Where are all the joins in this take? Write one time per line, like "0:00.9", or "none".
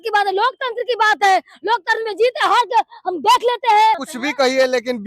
0:04.1